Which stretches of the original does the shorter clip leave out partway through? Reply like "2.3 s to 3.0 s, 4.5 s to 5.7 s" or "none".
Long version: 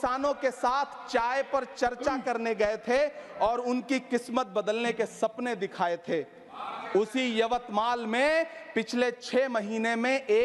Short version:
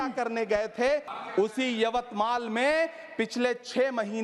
3.2 s to 6.7 s